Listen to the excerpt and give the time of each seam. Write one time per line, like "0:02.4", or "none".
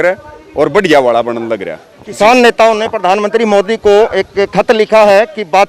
none